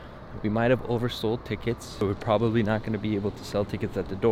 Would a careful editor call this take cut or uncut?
cut